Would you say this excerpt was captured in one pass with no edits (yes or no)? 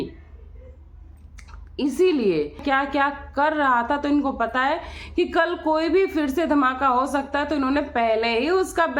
no